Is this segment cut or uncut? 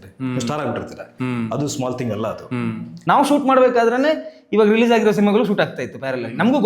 cut